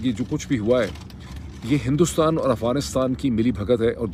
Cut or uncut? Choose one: uncut